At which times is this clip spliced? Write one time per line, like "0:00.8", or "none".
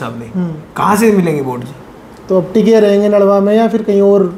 none